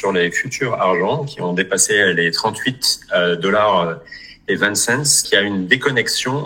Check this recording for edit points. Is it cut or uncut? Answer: cut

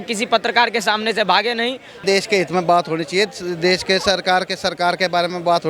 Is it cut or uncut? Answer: cut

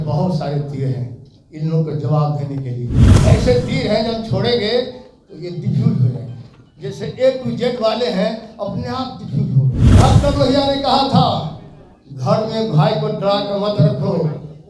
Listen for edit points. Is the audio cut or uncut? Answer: cut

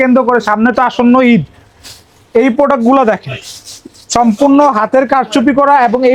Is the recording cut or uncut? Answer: uncut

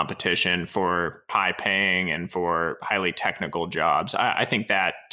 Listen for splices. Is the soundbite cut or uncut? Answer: cut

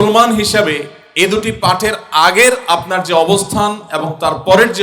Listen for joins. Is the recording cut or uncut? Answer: cut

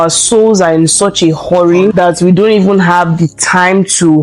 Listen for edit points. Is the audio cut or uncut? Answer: cut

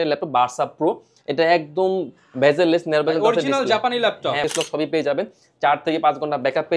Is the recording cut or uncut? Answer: cut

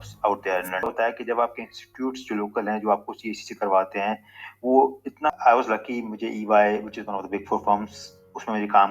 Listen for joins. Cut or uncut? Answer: cut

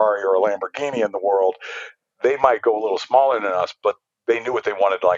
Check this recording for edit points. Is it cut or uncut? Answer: uncut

